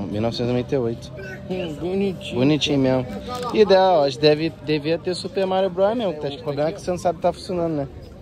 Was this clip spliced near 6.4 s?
yes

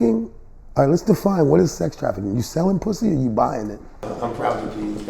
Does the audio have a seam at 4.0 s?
yes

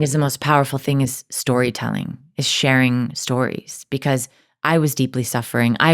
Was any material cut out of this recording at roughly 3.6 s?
no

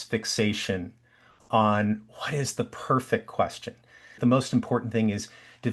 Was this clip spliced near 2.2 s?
no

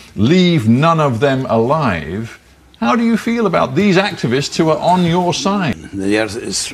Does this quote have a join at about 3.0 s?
no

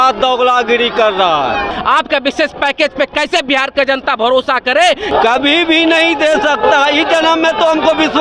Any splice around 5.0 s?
yes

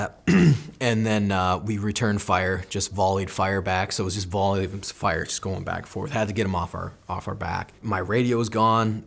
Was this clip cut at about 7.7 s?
yes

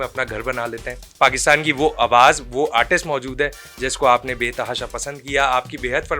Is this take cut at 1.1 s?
yes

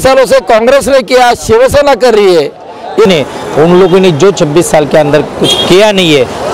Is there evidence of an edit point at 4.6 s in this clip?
no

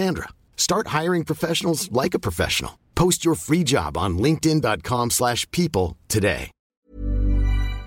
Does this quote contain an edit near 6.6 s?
yes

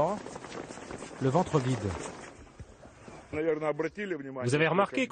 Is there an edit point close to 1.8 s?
no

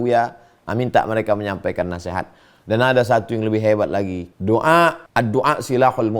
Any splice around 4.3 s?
yes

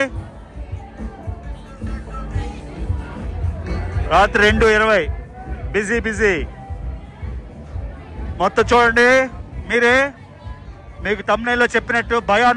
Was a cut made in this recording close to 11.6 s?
no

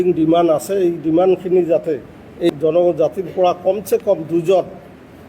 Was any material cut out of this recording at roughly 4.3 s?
no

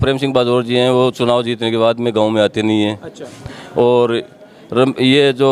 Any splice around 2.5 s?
no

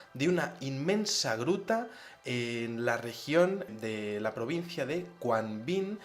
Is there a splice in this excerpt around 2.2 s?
no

